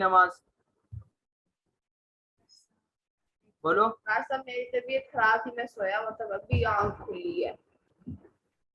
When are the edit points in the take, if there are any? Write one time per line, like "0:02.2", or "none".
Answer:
none